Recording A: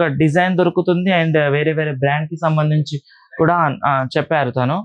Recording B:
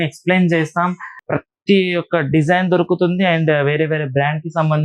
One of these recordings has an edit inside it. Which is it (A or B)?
B